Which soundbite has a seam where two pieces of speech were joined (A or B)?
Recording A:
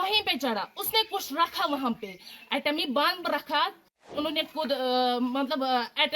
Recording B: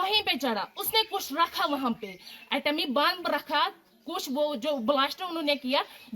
A